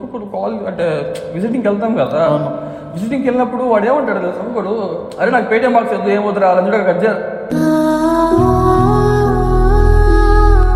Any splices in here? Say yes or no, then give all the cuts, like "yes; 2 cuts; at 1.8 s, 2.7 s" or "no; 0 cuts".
no; 0 cuts